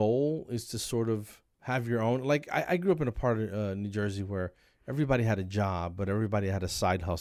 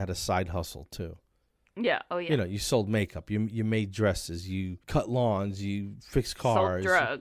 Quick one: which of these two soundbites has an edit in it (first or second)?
second